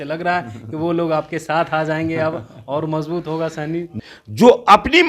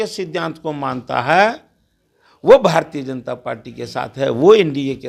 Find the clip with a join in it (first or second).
first